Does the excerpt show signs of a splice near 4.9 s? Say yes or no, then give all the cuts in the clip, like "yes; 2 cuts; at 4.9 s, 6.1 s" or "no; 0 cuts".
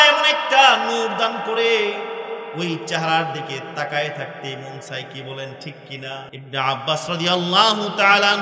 no; 1 cut; at 6.3 s